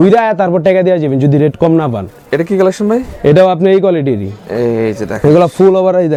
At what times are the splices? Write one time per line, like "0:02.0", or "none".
none